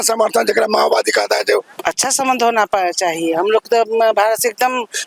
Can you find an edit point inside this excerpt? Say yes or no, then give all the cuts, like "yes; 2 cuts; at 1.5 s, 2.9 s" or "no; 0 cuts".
yes; 1 cut; at 1.7 s